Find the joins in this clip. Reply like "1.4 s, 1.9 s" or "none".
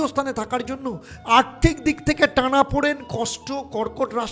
1.1 s